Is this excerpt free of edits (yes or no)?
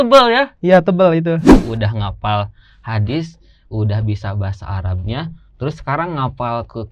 no